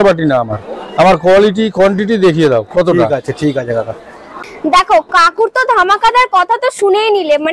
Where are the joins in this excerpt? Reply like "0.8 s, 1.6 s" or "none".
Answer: none